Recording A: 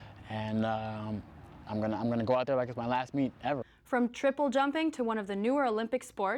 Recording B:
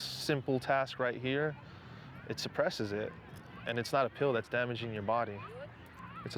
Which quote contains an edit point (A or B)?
A